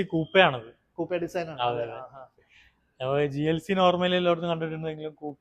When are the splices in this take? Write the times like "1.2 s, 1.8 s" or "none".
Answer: none

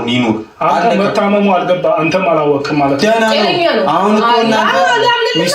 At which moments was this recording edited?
none

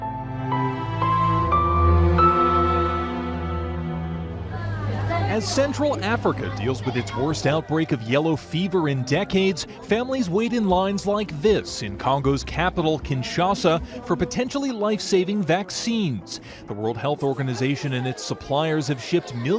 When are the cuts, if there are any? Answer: 13.3 s

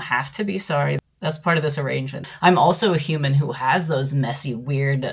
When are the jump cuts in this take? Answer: 1.0 s, 2.2 s

